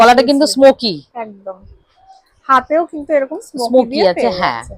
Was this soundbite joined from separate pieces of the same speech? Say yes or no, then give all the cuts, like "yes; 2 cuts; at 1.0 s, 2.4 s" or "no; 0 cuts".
no; 0 cuts